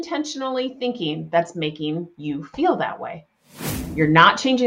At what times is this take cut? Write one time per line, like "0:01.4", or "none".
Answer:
0:03.8